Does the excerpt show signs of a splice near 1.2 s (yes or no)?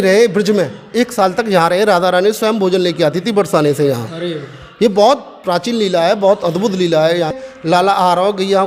no